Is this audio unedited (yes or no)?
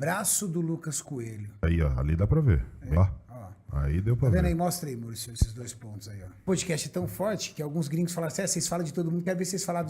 no